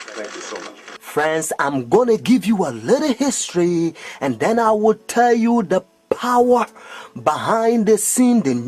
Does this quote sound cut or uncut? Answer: cut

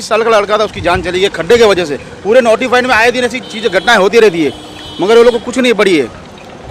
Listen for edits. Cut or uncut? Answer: uncut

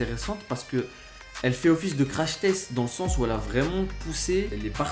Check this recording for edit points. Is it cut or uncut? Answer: uncut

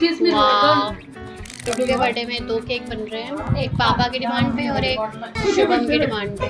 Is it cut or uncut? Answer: cut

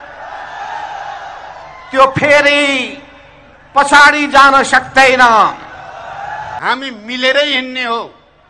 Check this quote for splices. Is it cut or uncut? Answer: cut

